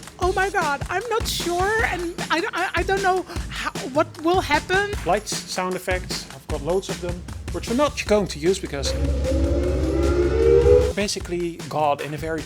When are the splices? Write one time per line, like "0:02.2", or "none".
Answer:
0:04.9
0:10.9